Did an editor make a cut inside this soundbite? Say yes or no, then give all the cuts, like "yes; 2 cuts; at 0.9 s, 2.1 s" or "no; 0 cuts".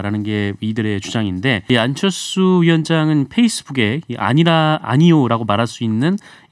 yes; 1 cut; at 1.6 s